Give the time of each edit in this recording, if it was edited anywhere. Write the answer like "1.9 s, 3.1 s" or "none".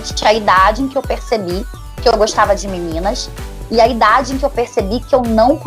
none